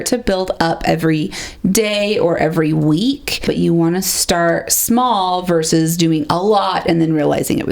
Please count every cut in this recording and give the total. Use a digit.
1